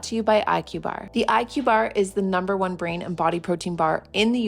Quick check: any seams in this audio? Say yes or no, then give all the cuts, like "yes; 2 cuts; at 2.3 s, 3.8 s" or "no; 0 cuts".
yes; 1 cut; at 1.0 s